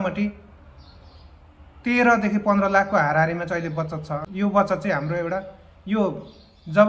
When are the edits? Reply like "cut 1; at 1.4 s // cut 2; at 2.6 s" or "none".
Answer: cut 1; at 4.2 s